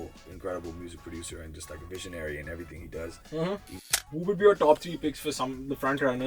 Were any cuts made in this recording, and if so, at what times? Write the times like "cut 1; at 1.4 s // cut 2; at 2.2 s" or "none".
cut 1; at 3.9 s